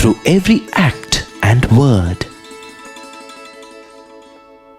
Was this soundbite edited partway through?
yes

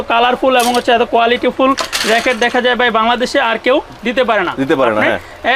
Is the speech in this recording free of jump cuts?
yes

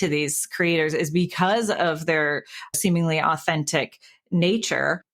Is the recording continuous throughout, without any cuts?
yes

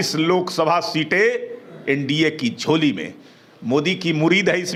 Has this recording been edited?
no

